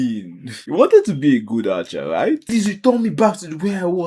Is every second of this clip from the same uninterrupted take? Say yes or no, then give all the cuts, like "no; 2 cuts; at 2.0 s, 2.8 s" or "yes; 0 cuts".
no; 1 cut; at 2.4 s